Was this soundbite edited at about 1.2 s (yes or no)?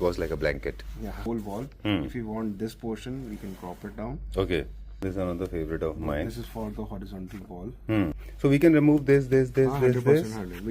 yes